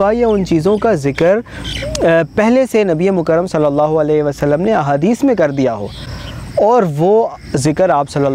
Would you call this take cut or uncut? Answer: uncut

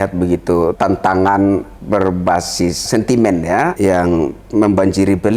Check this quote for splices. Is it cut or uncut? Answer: cut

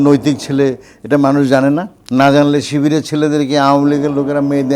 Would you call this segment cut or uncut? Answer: cut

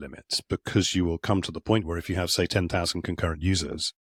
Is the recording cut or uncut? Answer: uncut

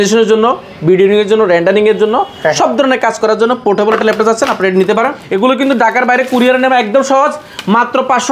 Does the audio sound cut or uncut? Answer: cut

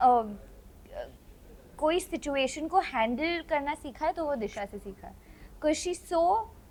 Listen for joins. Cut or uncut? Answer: uncut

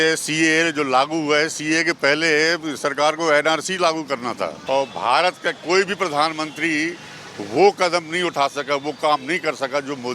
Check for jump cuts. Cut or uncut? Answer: cut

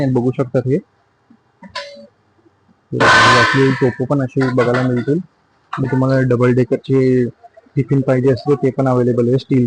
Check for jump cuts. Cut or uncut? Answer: cut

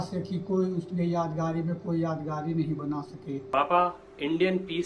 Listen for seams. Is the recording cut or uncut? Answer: cut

